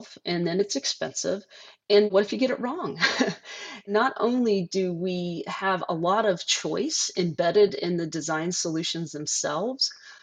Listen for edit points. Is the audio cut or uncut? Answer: cut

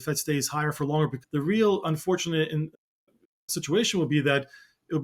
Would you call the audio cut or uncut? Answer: cut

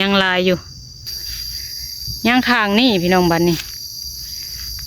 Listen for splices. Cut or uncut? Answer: cut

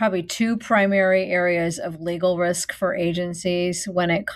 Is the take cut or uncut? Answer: uncut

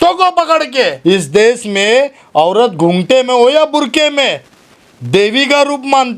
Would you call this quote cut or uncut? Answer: cut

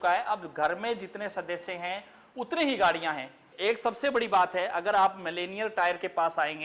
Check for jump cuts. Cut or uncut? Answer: cut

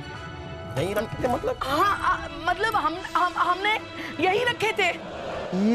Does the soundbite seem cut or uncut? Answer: uncut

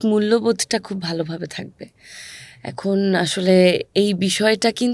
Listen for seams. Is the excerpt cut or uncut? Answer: uncut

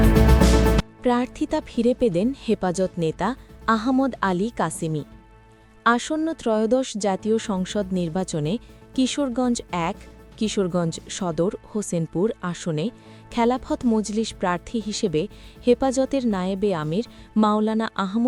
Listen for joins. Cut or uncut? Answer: uncut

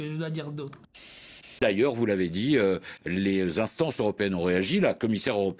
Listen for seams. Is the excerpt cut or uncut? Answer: cut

